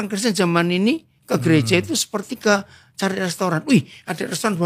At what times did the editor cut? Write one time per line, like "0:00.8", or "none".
none